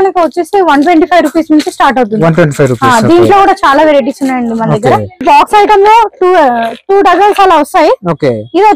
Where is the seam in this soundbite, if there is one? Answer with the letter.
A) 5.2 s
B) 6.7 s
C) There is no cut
A